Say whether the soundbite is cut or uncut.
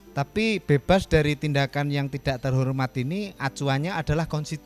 uncut